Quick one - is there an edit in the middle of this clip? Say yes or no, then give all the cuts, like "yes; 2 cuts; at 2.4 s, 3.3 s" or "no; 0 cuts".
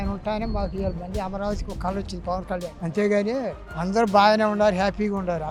no; 0 cuts